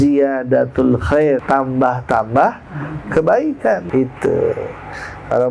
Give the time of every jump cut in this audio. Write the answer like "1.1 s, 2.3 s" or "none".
1.4 s, 3.8 s